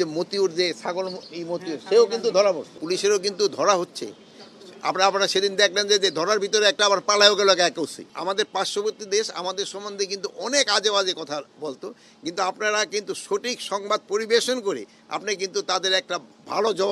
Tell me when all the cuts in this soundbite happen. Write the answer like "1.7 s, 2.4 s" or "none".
2.7 s, 8.0 s

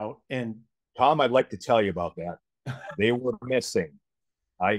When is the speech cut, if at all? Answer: none

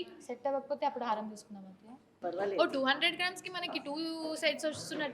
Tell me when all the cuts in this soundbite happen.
2.2 s

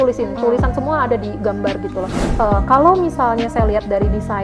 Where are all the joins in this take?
2.2 s

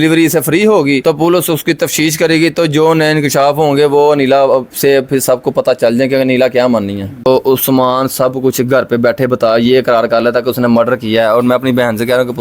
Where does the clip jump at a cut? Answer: 7.3 s

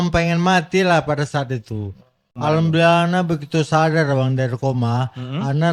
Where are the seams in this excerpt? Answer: 2.3 s

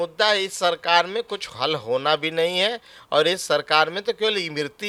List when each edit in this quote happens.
none

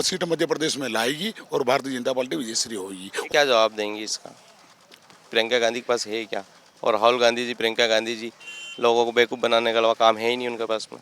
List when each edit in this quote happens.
3.3 s

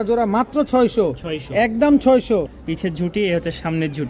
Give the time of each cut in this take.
2.5 s

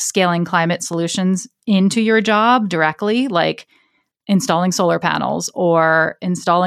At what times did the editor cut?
none

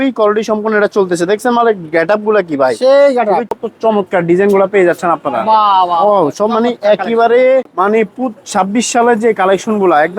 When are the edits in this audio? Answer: 3.5 s, 7.7 s

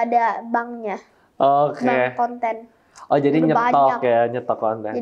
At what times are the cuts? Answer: none

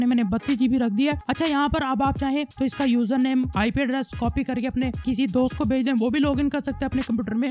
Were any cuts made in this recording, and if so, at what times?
1.2 s

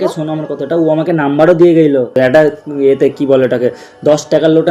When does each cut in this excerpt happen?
2.1 s

